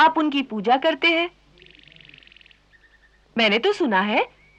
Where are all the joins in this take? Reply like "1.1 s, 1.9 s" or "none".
3.2 s